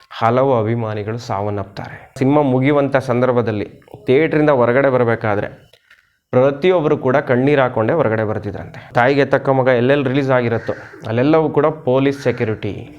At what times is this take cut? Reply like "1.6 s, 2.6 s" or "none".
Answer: 2.2 s, 8.9 s